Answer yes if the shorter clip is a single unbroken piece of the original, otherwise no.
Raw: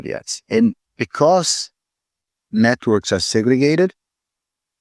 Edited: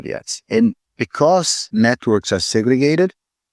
no